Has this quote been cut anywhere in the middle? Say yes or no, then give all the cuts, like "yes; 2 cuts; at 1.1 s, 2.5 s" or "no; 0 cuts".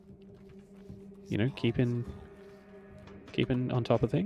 no; 0 cuts